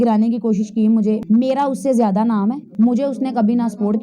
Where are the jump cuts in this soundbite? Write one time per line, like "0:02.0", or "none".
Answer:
0:01.2
0:02.6